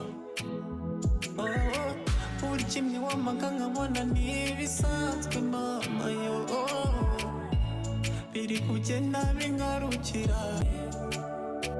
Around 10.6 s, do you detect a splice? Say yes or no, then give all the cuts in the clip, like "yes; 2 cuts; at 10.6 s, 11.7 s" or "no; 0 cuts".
yes; 1 cut; at 10.6 s